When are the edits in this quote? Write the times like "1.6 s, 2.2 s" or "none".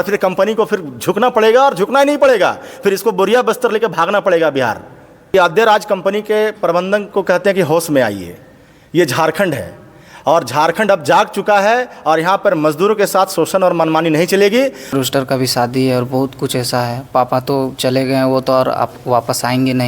5.2 s, 14.9 s